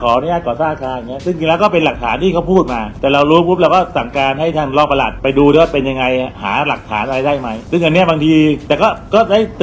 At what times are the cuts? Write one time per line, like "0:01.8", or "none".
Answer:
0:02.8
0:05.1
0:07.6
0:08.6